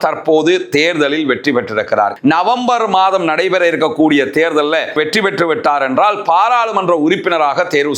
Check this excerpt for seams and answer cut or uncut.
cut